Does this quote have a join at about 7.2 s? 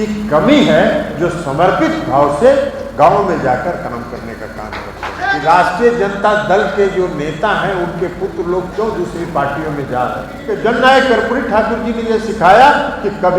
no; 2 cuts; at 5.3 s, 10.6 s

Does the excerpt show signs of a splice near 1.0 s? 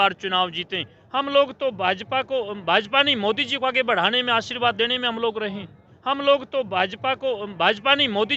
yes; 2 cuts; at 1.0 s, 5.9 s

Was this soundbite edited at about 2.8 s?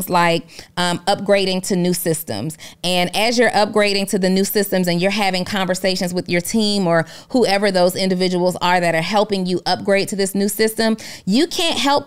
no; 0 cuts

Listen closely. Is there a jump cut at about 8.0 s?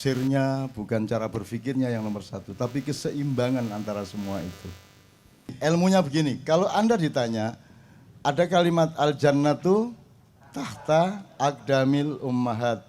no; 1 cut; at 5.5 s

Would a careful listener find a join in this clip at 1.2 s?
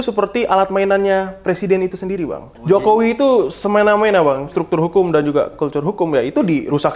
no; 2 cuts; at 2.5 s, 4.6 s

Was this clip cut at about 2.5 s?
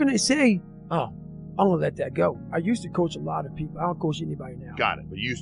yes; 1 cut; at 2.5 s

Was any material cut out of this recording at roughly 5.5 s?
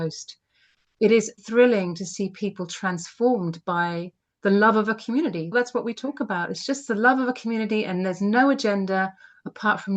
yes; 2 cuts; at 1.3 s, 5.5 s

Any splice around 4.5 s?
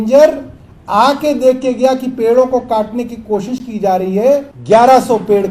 yes; 1 cut; at 4.5 s

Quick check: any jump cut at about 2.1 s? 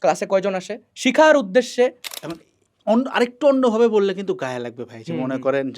yes; 1 cut; at 2.1 s

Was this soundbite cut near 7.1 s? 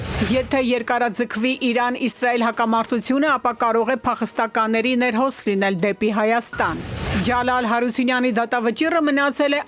yes; 1 cut; at 7.1 s

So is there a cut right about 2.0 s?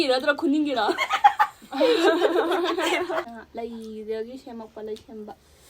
no; 1 cut; at 3.4 s

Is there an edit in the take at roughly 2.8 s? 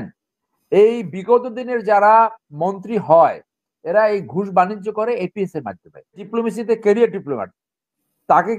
no; 1 cut; at 6.2 s

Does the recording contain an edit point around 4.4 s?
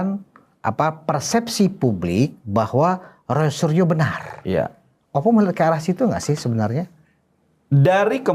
no; 0 cuts

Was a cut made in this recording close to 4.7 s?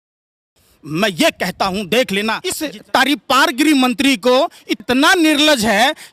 yes; 2 cuts; at 2.5 s, 4.7 s

